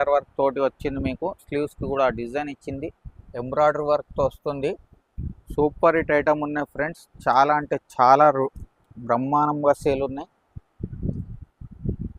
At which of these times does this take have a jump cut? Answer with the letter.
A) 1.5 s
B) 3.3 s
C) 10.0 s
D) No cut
B